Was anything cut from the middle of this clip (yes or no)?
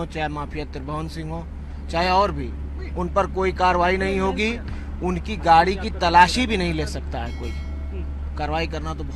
no